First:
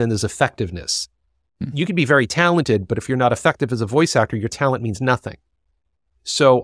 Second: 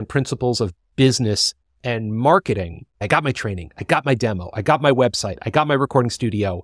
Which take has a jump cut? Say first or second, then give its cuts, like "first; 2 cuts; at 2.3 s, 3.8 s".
second; 1 cut; at 3.0 s